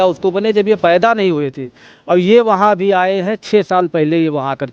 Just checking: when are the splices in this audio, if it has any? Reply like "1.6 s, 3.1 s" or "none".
none